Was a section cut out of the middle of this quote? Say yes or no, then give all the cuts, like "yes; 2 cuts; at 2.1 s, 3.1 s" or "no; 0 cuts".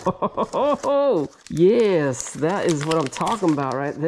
no; 0 cuts